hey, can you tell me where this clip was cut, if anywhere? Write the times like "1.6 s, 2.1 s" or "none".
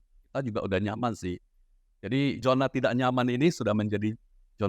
2.4 s